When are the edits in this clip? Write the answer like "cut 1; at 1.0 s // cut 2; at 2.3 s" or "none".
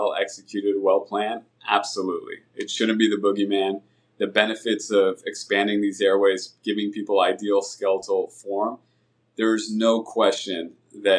none